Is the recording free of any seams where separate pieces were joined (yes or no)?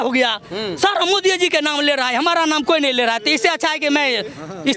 yes